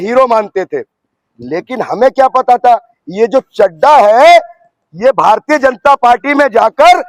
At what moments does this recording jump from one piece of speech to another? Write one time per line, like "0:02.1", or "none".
none

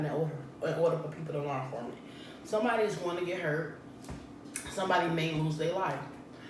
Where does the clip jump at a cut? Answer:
none

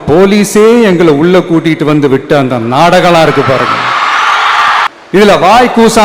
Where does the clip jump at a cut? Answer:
0:05.0

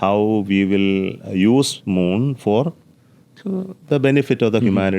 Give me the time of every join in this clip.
none

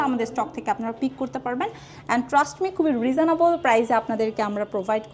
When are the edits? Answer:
none

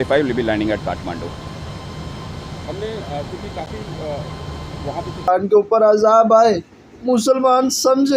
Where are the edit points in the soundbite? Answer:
0:05.3

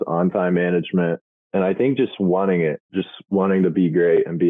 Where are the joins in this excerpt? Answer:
0:01.3
0:02.8

